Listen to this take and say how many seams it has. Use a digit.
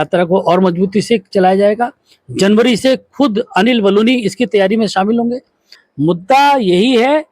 1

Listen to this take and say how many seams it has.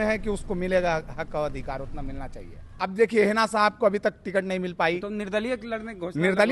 1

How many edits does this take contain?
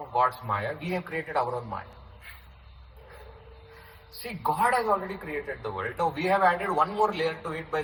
0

